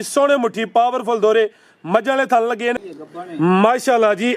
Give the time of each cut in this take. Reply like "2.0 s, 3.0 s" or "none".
2.8 s